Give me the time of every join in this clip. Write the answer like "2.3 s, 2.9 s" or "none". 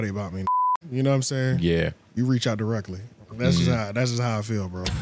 none